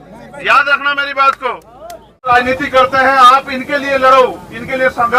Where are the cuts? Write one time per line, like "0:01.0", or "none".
0:02.3